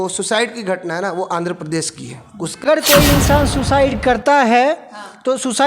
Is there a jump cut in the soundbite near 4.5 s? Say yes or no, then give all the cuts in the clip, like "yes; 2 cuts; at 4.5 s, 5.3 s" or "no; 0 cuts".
no; 1 cut; at 2.6 s